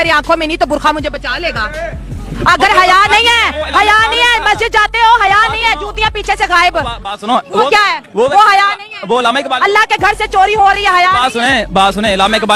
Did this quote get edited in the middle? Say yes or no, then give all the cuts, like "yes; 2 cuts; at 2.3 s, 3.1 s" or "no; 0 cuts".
no; 0 cuts